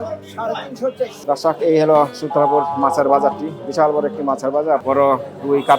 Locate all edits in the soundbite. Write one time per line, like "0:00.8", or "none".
0:01.2
0:04.8

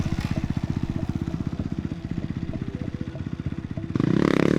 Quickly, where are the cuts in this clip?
none

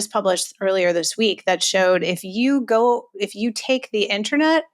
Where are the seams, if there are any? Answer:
none

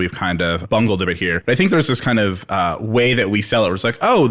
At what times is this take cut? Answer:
0:01.4

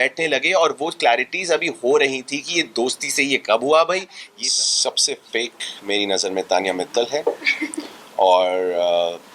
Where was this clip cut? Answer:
0:04.4

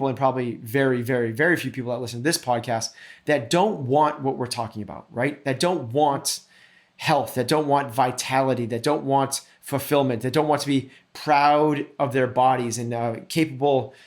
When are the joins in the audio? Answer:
none

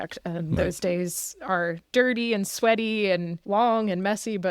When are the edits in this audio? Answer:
0:01.8
0:03.3

